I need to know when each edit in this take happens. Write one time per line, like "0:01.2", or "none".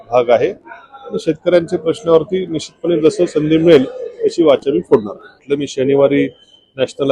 0:05.5

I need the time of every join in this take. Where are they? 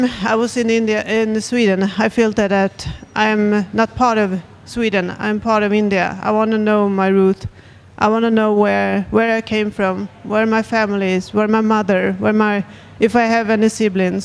none

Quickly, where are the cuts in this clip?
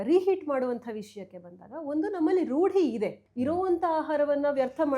0:03.2

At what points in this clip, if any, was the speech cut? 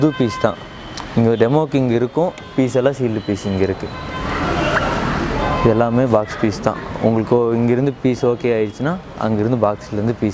none

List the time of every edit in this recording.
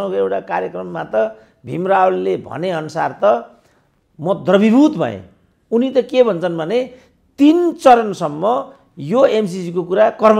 none

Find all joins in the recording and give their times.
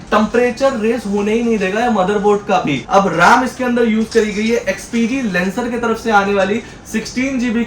0:02.8

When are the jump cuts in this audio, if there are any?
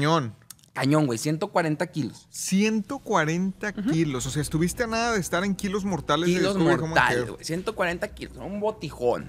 none

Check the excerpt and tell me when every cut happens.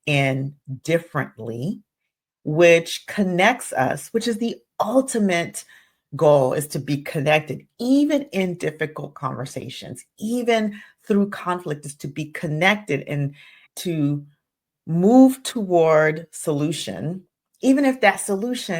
0:13.6

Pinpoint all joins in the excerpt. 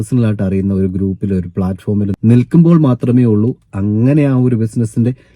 0:02.1

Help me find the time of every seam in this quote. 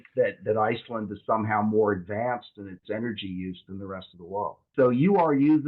0:04.6

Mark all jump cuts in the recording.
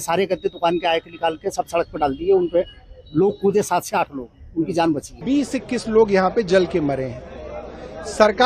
0:05.2

